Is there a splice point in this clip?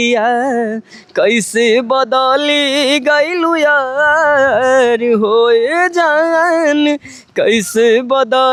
no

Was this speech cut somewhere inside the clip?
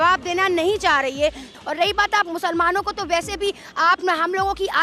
yes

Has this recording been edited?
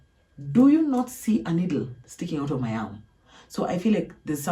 no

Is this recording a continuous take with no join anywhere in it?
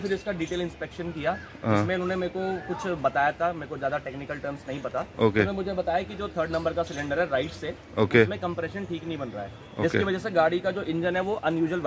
yes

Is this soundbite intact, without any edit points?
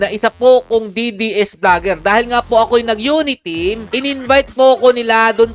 no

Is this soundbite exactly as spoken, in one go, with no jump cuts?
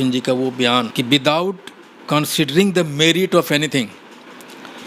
no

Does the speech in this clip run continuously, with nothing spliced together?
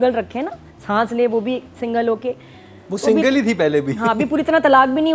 yes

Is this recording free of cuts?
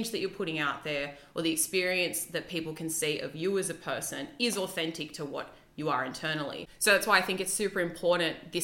no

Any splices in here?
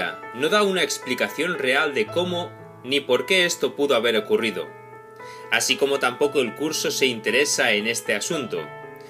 yes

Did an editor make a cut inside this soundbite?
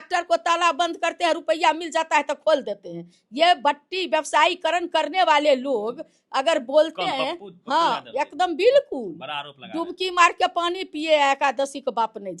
no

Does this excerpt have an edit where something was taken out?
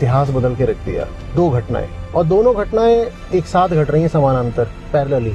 no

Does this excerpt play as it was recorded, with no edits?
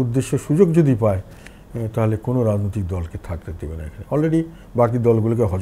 yes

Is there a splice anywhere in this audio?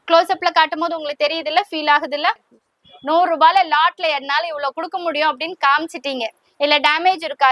yes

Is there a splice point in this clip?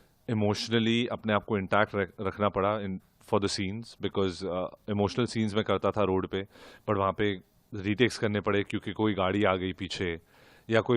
no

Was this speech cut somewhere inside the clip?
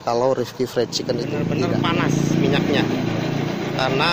yes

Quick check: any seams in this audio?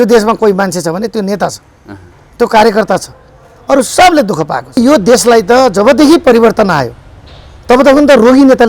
yes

